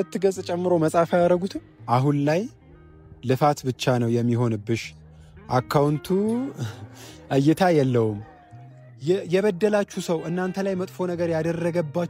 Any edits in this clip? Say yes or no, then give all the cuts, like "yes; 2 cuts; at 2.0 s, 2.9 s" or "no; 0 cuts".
yes; 2 cuts; at 2.0 s, 8.3 s